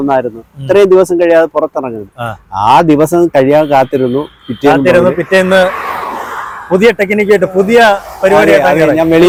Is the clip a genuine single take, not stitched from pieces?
yes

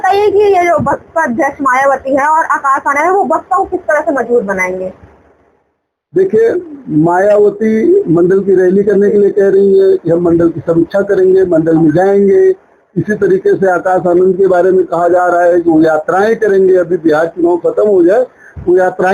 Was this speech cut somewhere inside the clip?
no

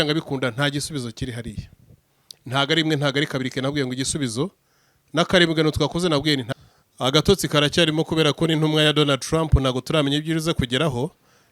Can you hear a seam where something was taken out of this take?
yes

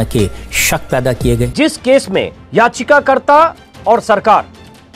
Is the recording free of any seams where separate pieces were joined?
no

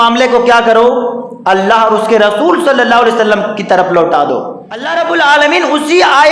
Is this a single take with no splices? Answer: no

